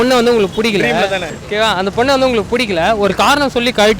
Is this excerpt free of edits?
no; 1 cut; at 1.3 s

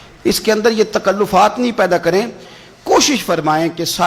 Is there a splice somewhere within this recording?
no; 0 cuts

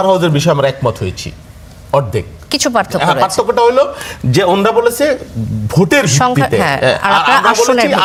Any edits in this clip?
no; 0 cuts

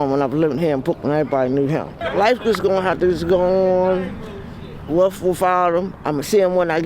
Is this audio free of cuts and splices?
no; 1 cut; at 2.0 s

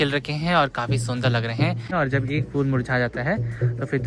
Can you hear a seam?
yes; 1 cut; at 1.9 s

